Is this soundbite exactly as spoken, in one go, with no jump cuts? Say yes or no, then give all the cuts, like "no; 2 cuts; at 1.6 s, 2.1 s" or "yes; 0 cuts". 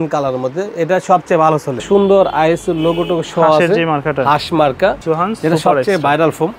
no; 2 cuts; at 1.8 s, 5.0 s